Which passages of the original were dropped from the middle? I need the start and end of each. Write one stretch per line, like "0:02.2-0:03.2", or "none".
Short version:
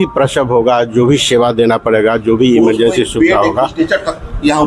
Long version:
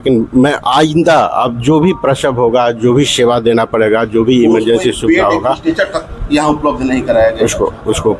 none